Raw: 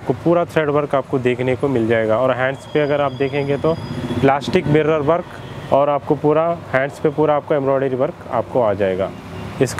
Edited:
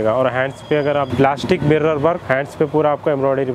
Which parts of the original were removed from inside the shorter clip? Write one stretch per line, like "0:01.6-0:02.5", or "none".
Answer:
0:03.1-0:04.1
0:05.3-0:06.7